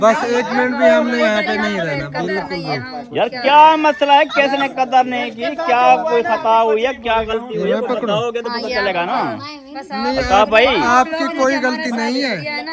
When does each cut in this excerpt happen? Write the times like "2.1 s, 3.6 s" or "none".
none